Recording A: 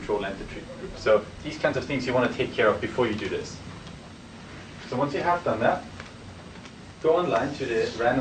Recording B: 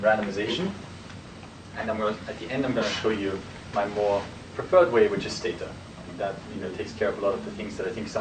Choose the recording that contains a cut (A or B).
A